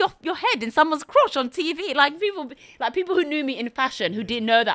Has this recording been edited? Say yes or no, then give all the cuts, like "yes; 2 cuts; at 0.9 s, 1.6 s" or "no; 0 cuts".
no; 0 cuts